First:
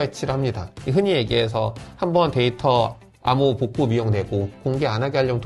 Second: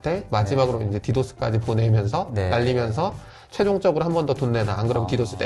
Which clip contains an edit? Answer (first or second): first